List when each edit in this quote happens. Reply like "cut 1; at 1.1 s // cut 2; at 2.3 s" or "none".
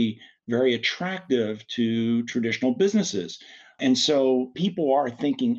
cut 1; at 4.6 s